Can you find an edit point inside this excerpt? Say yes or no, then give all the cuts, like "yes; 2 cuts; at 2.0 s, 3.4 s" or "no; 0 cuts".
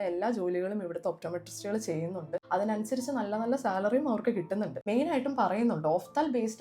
yes; 2 cuts; at 2.4 s, 4.8 s